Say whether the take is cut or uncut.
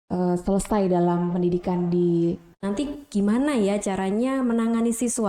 cut